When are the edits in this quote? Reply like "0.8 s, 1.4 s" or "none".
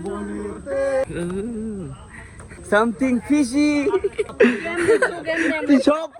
1.0 s, 2.5 s, 4.3 s